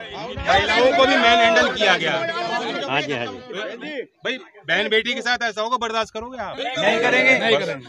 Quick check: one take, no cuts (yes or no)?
yes